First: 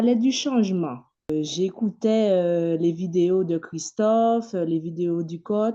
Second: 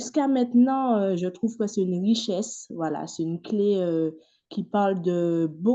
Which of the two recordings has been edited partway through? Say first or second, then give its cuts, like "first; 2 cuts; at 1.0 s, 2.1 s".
first; 1 cut; at 1.3 s